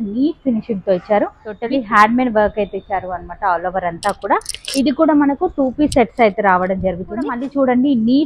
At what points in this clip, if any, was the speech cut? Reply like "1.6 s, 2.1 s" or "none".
1.6 s, 7.4 s